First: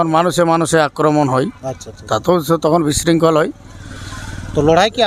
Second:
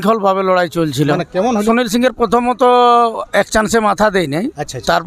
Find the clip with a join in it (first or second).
second